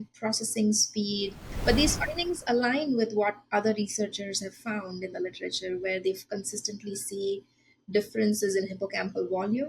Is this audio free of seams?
no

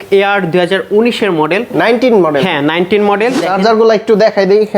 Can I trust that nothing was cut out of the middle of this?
no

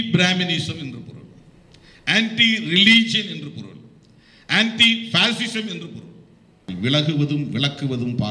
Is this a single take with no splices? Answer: no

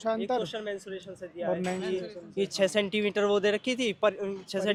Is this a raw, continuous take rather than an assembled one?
yes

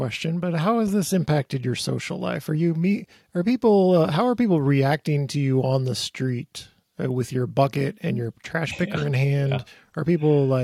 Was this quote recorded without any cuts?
yes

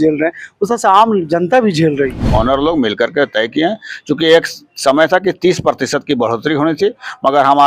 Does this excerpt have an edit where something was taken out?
yes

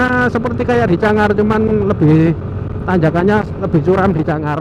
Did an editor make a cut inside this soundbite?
no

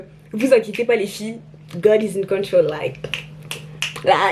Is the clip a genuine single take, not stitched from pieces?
yes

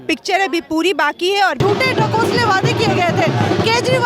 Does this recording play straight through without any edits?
no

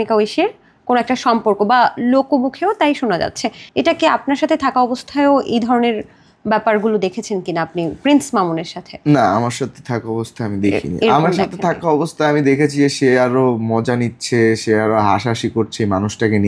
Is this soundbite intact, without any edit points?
yes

